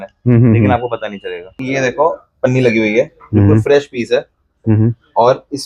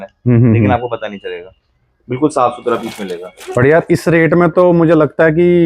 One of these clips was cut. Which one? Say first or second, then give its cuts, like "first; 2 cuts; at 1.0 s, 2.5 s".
first; 1 cut; at 1.6 s